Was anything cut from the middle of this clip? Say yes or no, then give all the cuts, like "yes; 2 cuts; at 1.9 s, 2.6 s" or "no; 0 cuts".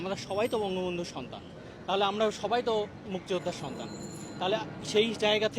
no; 0 cuts